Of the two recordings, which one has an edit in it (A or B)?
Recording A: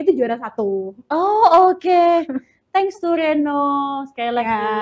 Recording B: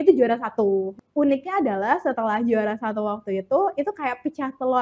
B